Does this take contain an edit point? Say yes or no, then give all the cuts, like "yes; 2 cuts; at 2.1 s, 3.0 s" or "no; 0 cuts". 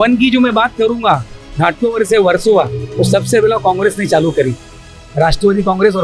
no; 0 cuts